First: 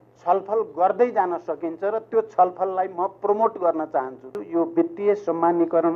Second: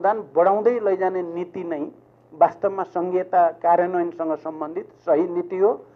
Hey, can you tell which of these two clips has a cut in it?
first; 1 cut; at 4.3 s

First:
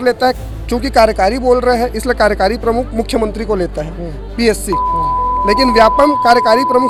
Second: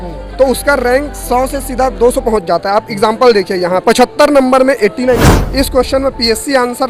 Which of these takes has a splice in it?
second; 2 cuts; at 3.8 s, 5.3 s

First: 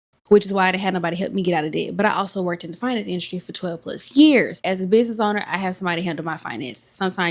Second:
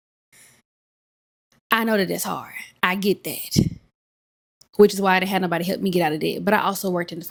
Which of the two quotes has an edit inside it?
first; 1 cut; at 4.6 s

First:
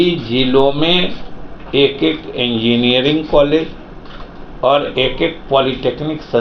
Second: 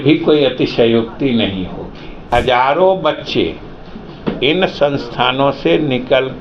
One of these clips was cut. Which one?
second; 1 cut; at 2.3 s

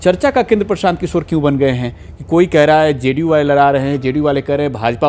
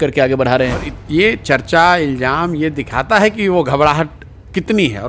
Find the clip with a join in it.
second; 1 cut; at 0.9 s

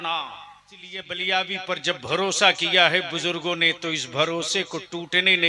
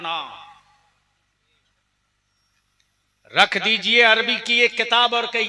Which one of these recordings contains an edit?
first; 1 cut; at 1.1 s

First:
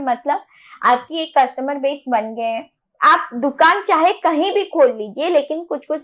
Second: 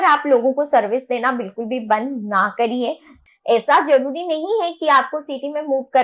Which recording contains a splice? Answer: second; 1 cut; at 3.1 s

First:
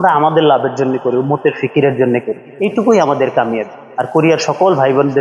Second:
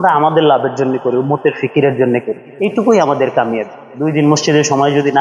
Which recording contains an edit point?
second; 1 cut; at 3.8 s

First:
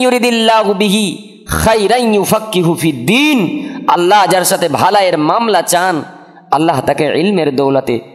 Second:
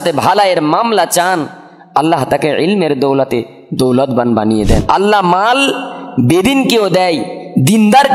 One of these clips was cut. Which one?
second; 1 cut; at 4.8 s

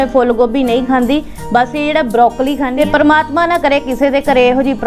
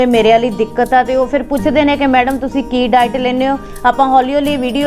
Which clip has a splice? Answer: first; 1 cut; at 2.7 s

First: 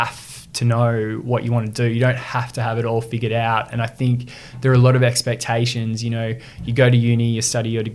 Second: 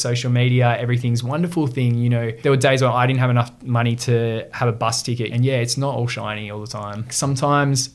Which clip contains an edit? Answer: second; 3 cuts; at 2.4 s, 5.3 s, 7.1 s

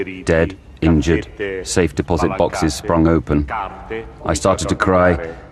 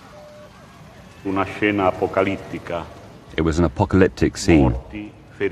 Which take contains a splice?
second; 1 cut; at 4.2 s

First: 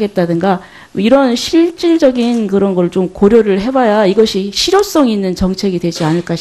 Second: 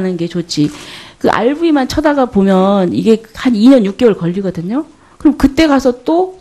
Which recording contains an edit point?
second; 1 cut; at 1.8 s

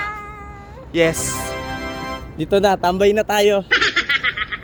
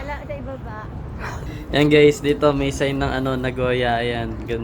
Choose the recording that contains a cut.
second; 1 cut; at 1.5 s

